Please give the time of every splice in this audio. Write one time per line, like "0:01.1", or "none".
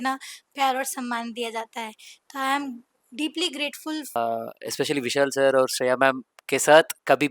0:04.2